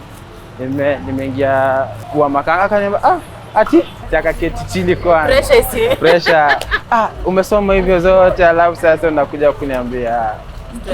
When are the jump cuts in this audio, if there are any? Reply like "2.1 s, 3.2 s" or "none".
2.0 s, 4.0 s

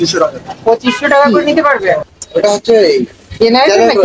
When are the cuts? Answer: 2.1 s

